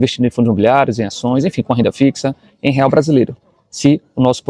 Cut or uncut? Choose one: uncut